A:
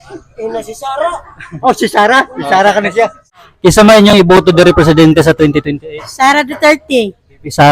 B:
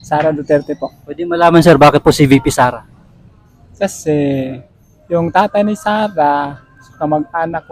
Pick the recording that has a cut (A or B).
A